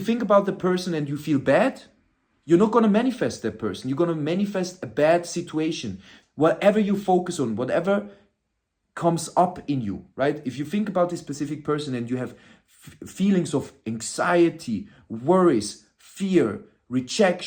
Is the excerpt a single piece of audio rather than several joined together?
yes; 0 cuts

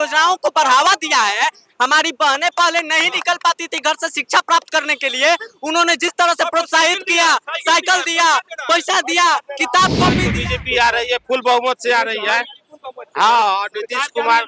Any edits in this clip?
yes; 1 cut; at 10.3 s

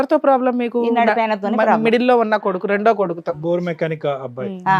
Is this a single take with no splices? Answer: yes; 0 cuts

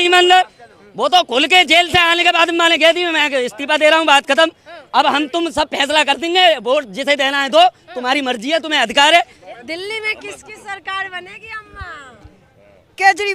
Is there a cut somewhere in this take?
yes; 1 cut; at 9.7 s

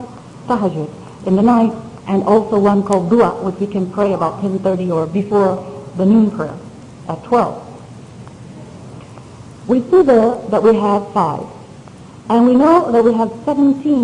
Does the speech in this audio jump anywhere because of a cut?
yes; 1 cut; at 1.0 s

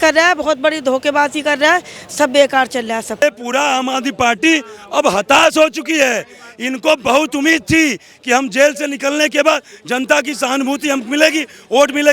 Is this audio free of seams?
no; 1 cut; at 3.2 s

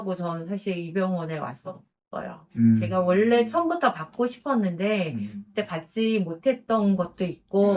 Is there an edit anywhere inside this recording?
no; 0 cuts

